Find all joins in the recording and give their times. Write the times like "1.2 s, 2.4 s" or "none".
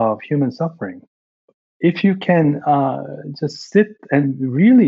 1.6 s